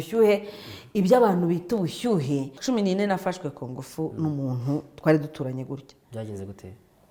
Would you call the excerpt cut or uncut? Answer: cut